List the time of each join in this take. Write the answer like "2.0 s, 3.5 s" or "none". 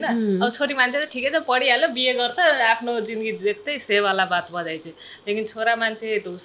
none